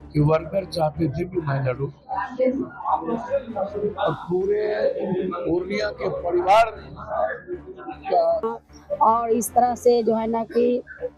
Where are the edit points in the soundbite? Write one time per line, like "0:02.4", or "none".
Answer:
0:08.5